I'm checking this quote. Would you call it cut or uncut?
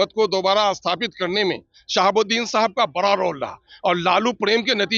uncut